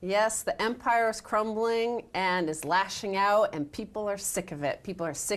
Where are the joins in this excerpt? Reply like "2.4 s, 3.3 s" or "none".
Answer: 0.9 s

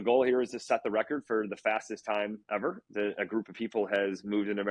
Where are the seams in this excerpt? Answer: 2.4 s

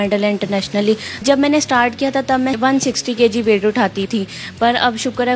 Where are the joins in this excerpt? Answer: 1.2 s, 2.6 s, 4.0 s

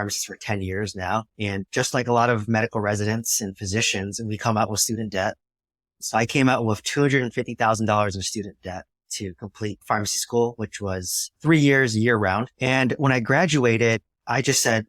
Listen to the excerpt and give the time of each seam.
1.5 s

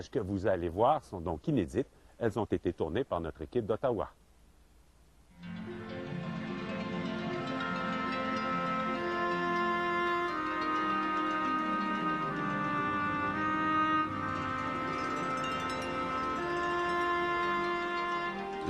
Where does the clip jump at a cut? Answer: none

